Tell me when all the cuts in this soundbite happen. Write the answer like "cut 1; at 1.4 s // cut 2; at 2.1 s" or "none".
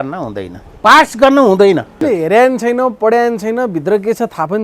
cut 1; at 2.0 s